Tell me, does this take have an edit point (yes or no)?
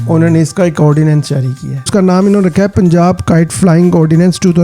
yes